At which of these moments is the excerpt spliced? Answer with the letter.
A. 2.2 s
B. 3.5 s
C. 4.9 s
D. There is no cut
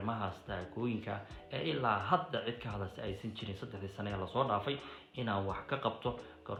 D